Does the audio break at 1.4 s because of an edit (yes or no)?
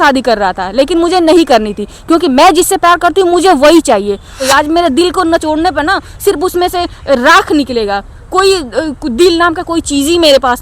no